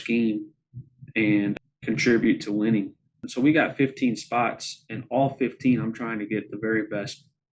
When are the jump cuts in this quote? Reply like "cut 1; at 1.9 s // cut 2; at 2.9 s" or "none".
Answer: cut 1; at 1.6 s // cut 2; at 3.2 s